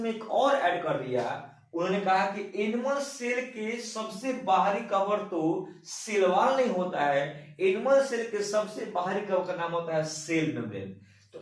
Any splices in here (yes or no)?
yes